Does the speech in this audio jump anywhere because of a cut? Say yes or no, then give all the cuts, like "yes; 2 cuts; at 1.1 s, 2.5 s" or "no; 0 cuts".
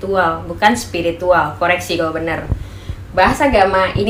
no; 0 cuts